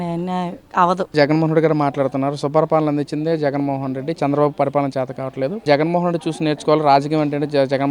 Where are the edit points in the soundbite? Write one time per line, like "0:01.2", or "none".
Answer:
0:01.1
0:05.6